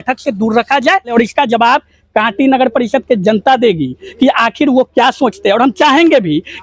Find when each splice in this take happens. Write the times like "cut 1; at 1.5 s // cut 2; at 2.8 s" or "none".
cut 1; at 1.1 s